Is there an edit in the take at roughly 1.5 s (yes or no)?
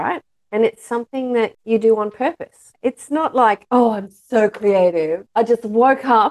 yes